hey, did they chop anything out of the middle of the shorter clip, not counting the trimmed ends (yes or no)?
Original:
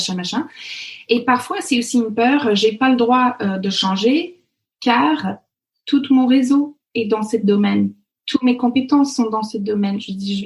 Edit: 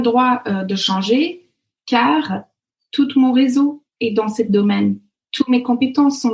no